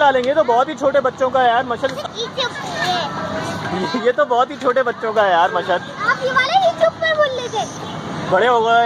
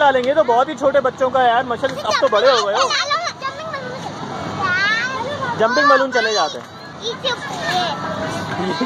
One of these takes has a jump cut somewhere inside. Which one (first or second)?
first